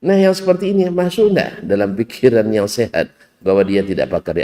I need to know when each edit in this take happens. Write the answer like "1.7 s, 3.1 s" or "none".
none